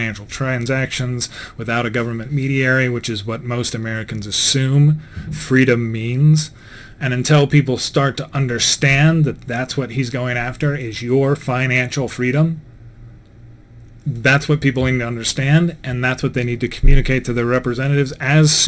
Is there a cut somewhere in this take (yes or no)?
no